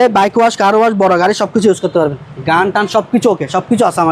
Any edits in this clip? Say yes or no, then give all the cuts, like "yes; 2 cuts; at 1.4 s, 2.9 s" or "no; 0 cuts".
no; 0 cuts